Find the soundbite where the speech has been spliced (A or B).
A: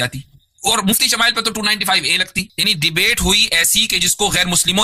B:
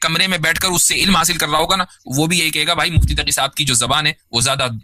A